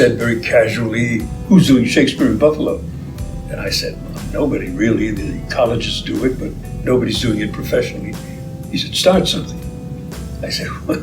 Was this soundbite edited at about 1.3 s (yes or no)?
yes